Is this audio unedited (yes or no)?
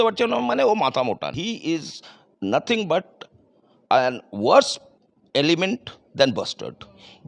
no